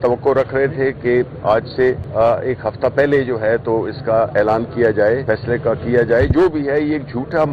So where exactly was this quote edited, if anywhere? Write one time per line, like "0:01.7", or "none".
0:02.0
0:05.2